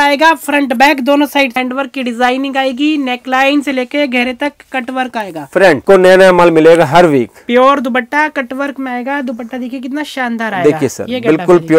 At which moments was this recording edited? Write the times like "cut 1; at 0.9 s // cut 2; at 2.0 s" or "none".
cut 1; at 1.5 s // cut 2; at 5.8 s